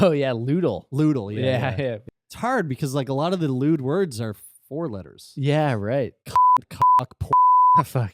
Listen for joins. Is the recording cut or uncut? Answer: cut